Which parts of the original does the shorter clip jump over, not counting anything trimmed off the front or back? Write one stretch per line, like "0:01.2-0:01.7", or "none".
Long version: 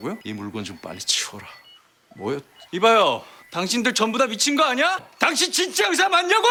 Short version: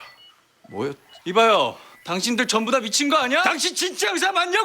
0:05.0-0:05.3